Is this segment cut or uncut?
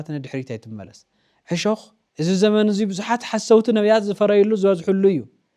cut